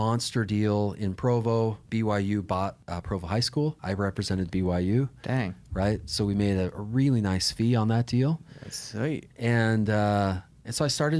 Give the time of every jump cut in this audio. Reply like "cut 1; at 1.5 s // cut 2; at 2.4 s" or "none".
cut 1; at 1.8 s // cut 2; at 2.9 s // cut 3; at 3.8 s